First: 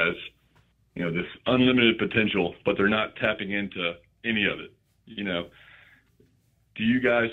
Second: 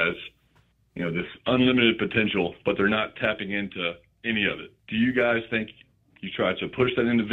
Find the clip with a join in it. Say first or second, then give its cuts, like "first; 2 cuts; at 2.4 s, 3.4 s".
second; 1 cut; at 4.7 s